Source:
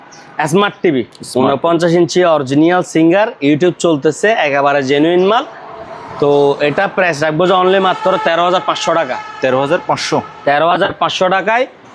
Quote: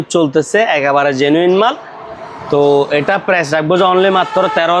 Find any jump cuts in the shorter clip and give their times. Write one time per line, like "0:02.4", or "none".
none